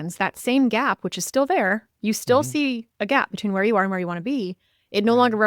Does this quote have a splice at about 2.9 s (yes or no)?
yes